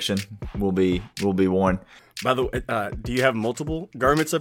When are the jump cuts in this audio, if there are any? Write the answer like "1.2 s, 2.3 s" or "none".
2.2 s